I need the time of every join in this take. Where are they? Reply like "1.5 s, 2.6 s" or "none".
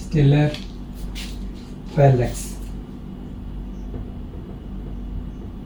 none